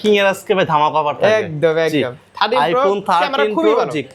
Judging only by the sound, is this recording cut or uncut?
uncut